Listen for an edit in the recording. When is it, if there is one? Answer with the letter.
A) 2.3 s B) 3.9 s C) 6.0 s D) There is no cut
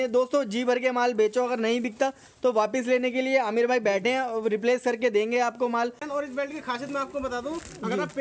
C